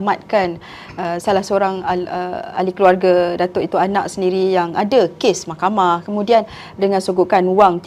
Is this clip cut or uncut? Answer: uncut